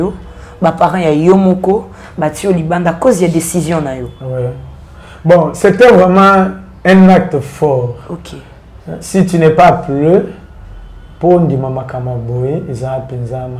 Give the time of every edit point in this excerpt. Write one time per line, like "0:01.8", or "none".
0:05.4